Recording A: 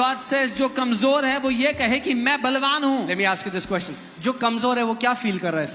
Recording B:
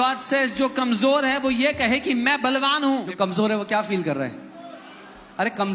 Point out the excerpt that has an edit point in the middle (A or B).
B